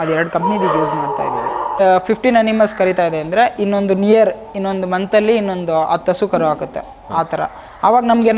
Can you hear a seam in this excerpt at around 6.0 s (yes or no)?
no